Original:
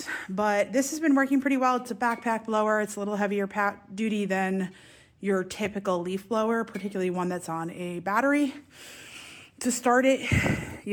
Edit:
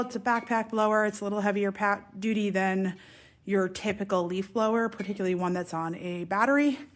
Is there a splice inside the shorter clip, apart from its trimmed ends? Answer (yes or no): no